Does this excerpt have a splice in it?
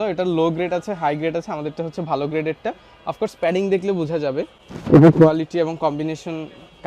no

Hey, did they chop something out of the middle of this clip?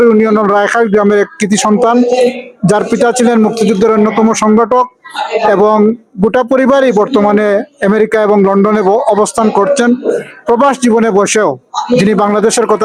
no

